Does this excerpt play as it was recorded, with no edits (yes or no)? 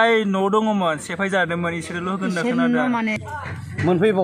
no